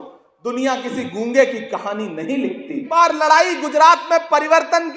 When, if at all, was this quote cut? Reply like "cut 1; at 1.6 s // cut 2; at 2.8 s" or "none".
cut 1; at 2.8 s